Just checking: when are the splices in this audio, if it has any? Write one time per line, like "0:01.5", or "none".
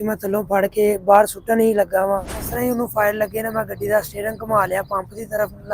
0:02.4